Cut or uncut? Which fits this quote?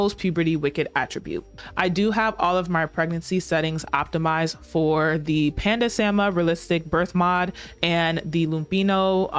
cut